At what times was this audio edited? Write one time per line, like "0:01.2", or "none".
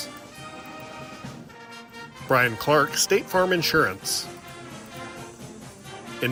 none